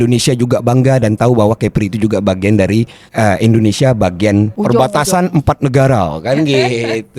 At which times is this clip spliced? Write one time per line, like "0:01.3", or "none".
0:03.0
0:04.5